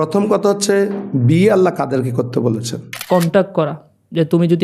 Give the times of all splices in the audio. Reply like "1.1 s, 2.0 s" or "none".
2.9 s